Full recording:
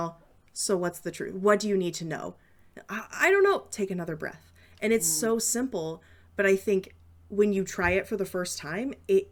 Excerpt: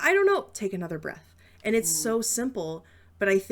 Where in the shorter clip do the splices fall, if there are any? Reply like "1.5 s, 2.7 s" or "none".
none